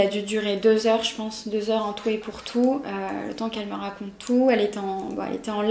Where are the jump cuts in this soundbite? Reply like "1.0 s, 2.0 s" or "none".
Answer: none